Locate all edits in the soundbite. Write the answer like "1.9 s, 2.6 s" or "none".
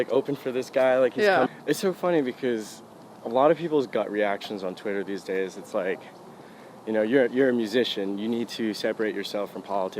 1.5 s